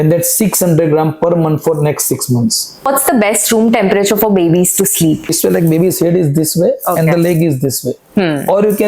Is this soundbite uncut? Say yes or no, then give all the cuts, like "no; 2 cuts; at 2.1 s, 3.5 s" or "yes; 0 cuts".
no; 2 cuts; at 2.9 s, 5.4 s